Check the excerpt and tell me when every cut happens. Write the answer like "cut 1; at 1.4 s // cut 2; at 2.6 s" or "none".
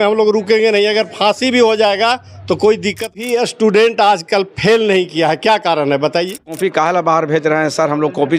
cut 1; at 3.1 s // cut 2; at 6.6 s